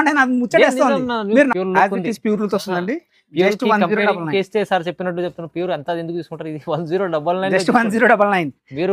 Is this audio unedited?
no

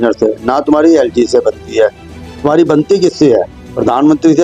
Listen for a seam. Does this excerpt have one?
no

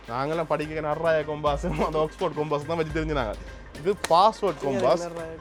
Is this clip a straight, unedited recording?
yes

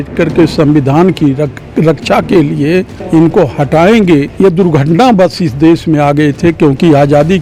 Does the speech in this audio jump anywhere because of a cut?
no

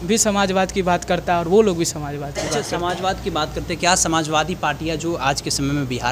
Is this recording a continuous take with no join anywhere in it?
yes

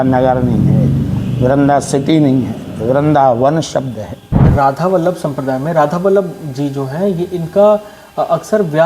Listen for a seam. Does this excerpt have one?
yes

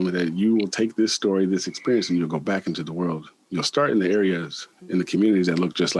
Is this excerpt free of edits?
yes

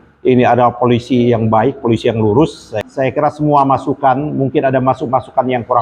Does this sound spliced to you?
yes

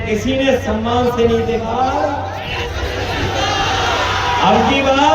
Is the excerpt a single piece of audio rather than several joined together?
no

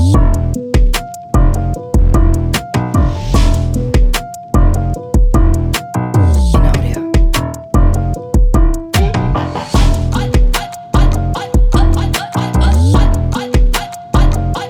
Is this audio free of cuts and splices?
yes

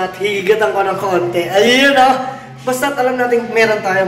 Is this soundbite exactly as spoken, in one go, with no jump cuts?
yes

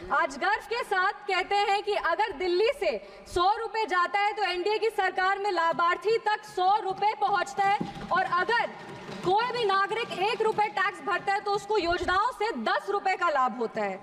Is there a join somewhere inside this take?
no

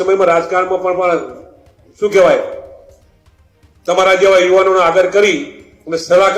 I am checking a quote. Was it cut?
no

